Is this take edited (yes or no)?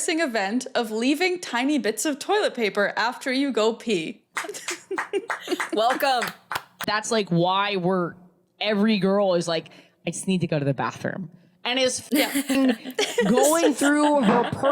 yes